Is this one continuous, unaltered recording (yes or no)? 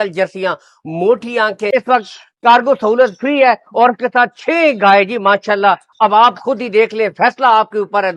no